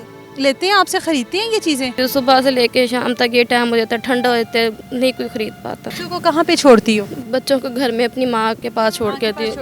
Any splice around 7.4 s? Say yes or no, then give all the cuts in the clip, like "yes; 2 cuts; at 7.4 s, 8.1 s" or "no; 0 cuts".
no; 3 cuts; at 2.0 s, 6.0 s, 8.6 s